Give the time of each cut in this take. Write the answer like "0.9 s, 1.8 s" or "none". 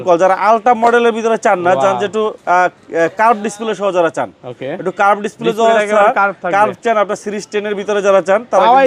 none